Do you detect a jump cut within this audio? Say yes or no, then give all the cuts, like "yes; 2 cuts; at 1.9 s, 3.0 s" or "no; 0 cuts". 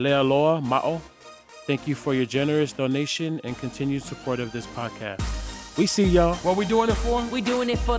yes; 1 cut; at 6.4 s